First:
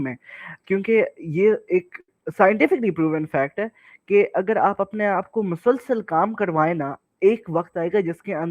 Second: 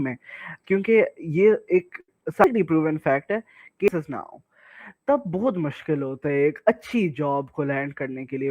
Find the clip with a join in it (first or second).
second